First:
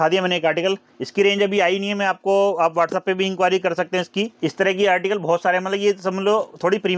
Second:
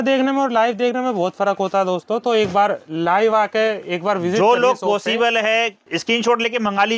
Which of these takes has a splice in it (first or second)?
second